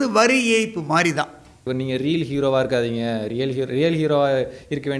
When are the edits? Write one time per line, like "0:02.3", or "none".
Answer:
0:01.7